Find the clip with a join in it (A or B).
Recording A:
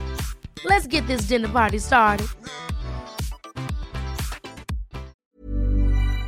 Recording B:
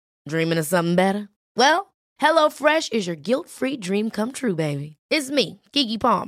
A